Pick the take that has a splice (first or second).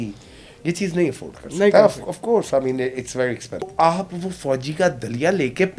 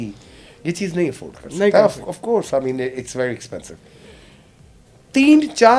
first